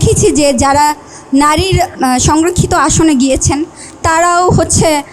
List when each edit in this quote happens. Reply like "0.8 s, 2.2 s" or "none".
2.0 s